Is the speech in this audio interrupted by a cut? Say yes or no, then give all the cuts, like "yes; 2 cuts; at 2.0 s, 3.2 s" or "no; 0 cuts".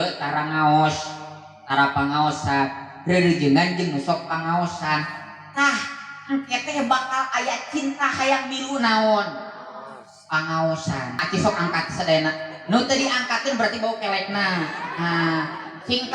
yes; 1 cut; at 11.2 s